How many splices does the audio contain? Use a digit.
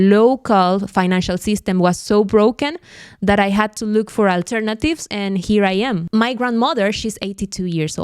1